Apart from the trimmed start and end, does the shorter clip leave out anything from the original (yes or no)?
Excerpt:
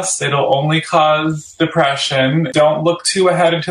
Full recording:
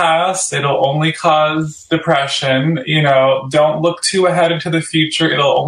yes